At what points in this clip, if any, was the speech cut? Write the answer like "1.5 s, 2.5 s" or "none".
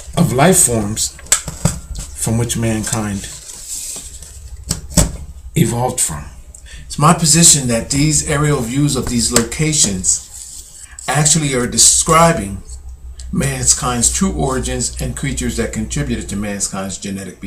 none

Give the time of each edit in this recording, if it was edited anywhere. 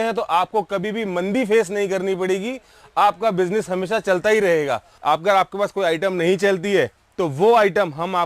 4.9 s

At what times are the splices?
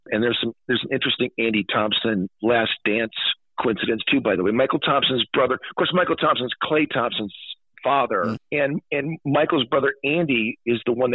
8.4 s

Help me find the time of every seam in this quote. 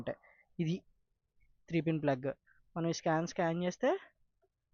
none

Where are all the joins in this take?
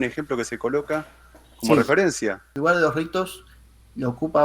2.6 s

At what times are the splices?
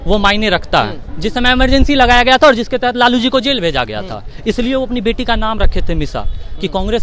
1.0 s

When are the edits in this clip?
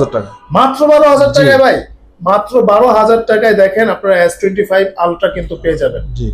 none

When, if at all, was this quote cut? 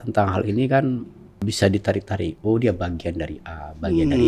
1.4 s

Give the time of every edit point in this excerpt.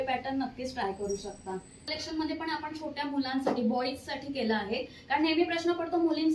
1.8 s

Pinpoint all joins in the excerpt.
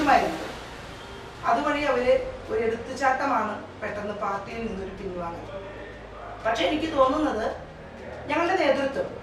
none

